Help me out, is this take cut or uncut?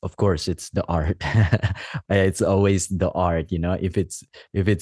uncut